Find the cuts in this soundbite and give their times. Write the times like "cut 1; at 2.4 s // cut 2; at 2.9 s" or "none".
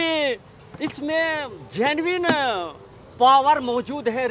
none